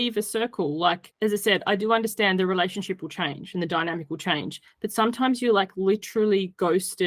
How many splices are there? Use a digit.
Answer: 1